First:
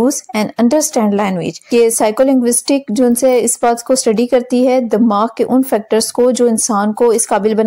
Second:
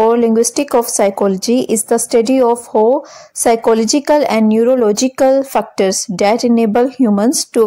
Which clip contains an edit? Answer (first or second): first